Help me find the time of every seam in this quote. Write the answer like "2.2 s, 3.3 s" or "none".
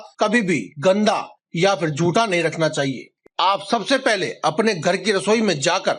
3.2 s